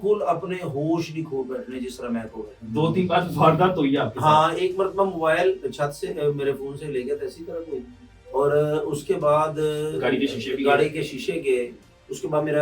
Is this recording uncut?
no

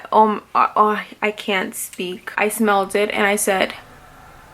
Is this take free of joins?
no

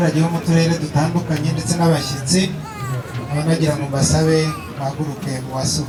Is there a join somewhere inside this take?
no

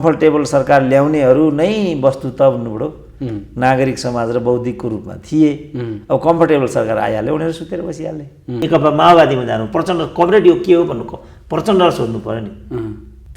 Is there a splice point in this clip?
yes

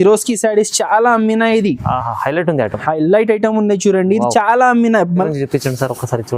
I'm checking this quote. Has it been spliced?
yes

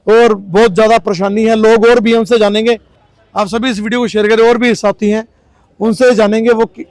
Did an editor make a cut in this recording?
no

